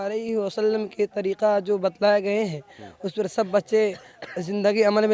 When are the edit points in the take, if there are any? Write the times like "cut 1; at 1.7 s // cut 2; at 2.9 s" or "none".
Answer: cut 1; at 4.2 s